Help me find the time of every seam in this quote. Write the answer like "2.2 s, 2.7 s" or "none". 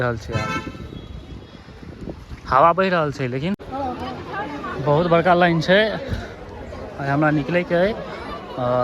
3.6 s